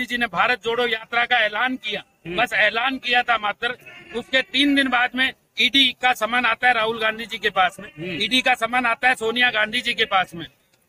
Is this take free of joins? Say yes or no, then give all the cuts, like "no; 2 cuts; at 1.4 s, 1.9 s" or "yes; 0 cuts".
yes; 0 cuts